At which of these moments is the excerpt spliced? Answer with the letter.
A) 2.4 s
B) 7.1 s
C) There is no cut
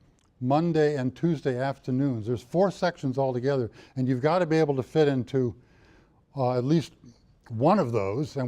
A